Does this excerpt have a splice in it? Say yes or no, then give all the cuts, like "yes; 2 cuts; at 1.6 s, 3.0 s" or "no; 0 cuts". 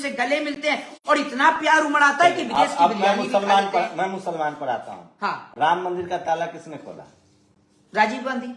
no; 0 cuts